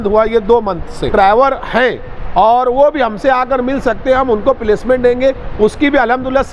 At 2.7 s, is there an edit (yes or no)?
no